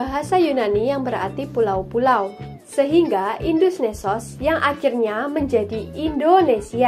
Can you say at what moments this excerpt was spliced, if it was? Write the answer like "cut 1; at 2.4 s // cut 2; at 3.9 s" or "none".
none